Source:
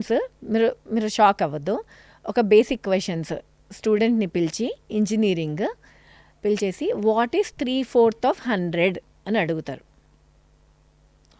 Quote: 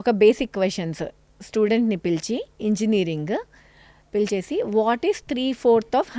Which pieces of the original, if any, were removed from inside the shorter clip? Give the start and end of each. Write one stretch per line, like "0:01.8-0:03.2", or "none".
none